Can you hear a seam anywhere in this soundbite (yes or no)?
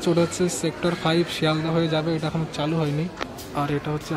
no